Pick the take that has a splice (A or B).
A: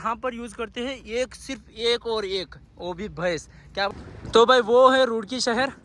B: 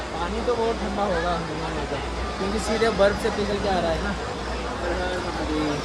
A